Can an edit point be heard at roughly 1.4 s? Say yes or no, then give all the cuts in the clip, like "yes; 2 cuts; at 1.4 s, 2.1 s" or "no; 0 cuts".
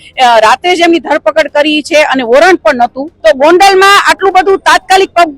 no; 1 cut; at 3.1 s